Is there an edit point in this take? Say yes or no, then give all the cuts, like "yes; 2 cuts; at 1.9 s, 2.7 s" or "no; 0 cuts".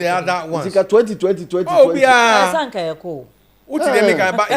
no; 0 cuts